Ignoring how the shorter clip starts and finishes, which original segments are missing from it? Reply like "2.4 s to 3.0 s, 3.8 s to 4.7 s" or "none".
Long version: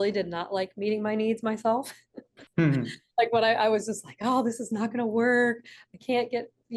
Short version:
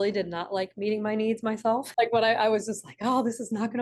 1.9 s to 3.1 s